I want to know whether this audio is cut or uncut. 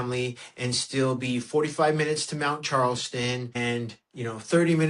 uncut